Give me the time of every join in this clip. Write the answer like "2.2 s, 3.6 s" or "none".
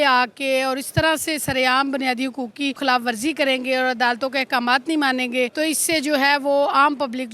2.8 s, 5.5 s

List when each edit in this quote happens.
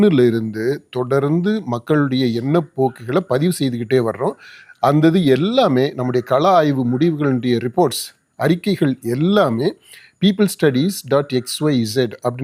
none

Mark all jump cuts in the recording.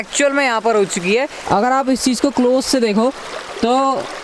1.4 s

